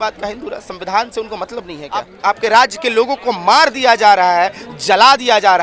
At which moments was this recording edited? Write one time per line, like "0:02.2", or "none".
0:02.1

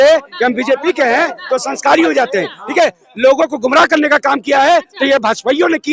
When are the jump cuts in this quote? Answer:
none

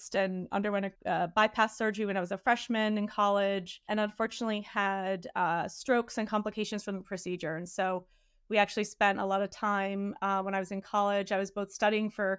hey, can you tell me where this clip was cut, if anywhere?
0:00.9
0:03.8

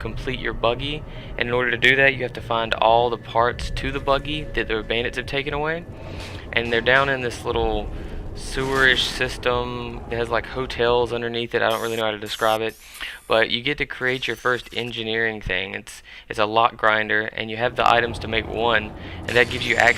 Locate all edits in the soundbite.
0:10.7

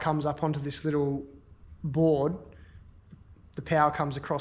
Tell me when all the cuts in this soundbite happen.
none

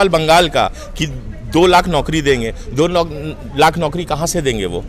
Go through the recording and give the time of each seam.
none

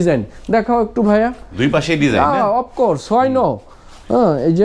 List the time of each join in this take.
none

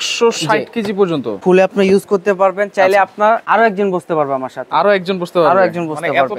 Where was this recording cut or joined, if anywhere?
0:01.4
0:03.4

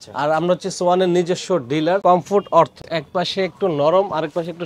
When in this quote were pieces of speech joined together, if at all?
0:02.0
0:02.9

